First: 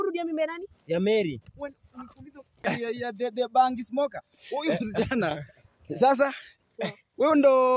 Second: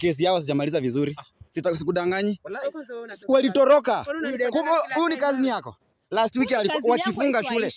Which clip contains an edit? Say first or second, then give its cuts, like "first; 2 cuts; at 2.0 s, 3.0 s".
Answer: first; 1 cut; at 2.6 s